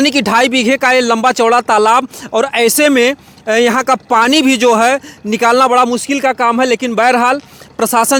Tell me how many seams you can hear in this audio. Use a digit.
0